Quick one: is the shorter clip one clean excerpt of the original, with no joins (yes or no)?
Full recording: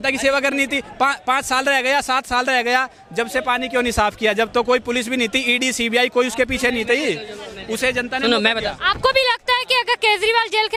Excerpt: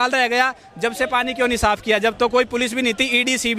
yes